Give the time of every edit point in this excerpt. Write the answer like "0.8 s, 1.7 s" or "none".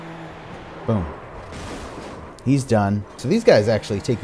3.2 s